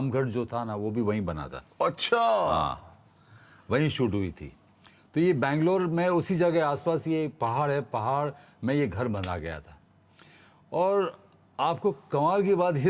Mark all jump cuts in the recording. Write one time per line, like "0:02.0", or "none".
none